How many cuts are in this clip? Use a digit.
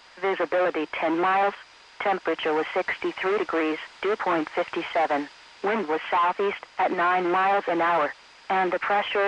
1